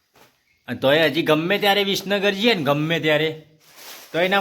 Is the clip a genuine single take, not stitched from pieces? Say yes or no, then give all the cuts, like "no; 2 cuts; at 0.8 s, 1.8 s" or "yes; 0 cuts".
no; 1 cut; at 2.6 s